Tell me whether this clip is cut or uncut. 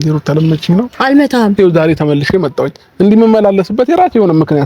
cut